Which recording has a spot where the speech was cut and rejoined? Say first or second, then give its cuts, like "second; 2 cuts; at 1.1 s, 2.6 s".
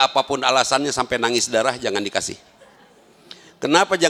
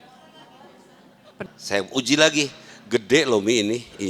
second; 1 cut; at 1.4 s